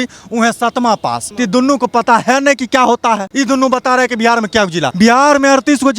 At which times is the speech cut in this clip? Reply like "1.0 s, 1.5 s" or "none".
1.2 s, 3.3 s, 4.9 s